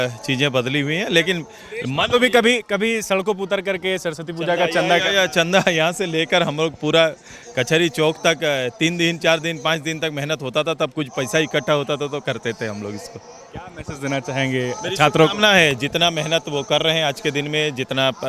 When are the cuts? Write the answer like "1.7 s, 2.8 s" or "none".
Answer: none